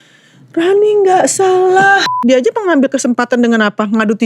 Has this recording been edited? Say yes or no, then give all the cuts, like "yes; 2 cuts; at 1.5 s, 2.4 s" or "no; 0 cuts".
yes; 1 cut; at 2.1 s